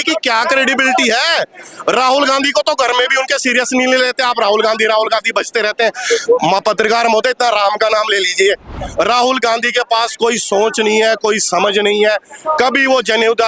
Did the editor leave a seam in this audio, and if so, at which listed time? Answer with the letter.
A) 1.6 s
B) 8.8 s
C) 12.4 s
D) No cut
B